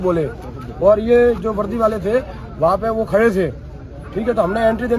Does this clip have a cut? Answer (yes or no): no